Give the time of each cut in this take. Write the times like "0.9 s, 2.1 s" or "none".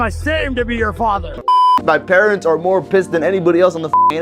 1.5 s